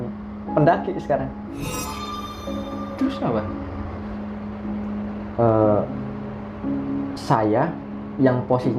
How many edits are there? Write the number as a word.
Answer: one